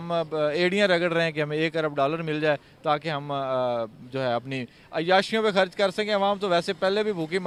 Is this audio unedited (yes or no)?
yes